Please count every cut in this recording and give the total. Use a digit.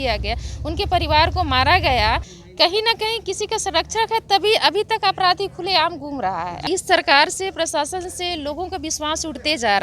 2